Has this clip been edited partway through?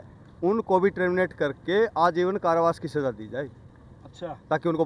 no; 0 cuts

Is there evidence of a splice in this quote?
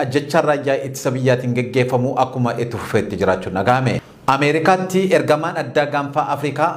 yes; 1 cut; at 4.1 s

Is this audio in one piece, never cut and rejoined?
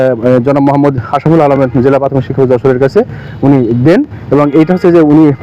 yes; 0 cuts

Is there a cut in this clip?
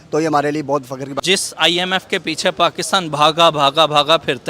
yes; 1 cut; at 1.2 s

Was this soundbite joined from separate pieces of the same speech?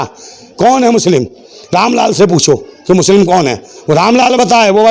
no; 0 cuts

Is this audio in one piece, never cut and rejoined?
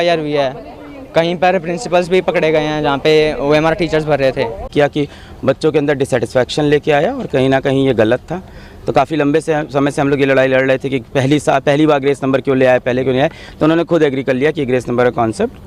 no; 1 cut; at 4.6 s

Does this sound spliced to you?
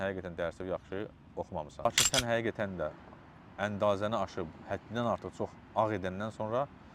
yes; 1 cut; at 1.9 s

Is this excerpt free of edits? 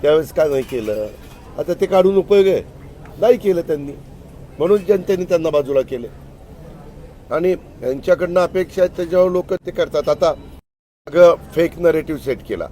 yes; 0 cuts

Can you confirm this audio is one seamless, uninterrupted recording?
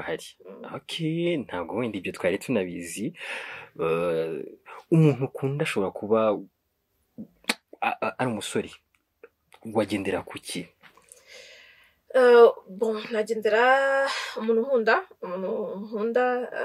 yes; 0 cuts

